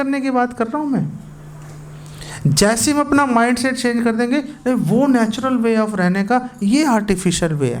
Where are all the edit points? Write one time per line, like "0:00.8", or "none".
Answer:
none